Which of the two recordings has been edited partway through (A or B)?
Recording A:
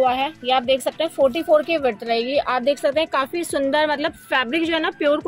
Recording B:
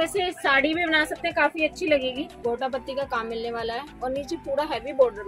B